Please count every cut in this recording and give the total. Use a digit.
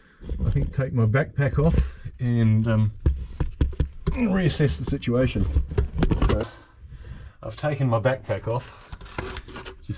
1